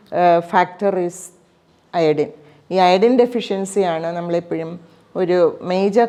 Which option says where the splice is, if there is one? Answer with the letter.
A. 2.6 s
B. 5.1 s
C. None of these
C